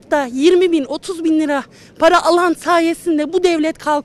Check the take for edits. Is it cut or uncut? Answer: uncut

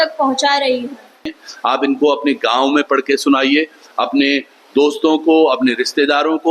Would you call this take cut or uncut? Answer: cut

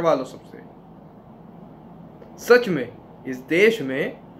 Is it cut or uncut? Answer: uncut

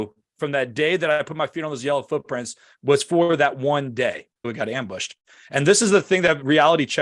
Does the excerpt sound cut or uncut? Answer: cut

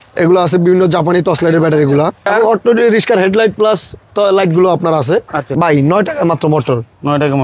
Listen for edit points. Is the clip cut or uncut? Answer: cut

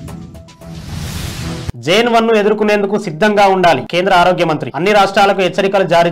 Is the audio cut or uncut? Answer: cut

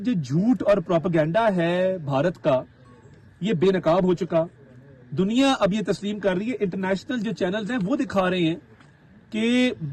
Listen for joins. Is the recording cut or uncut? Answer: uncut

